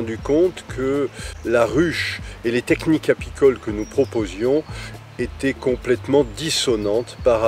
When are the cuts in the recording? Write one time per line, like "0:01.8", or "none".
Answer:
0:01.3